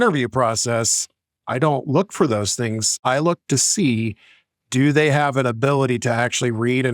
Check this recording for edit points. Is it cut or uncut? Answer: cut